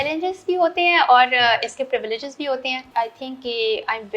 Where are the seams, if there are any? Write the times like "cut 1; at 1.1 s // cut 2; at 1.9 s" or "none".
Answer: cut 1; at 2.8 s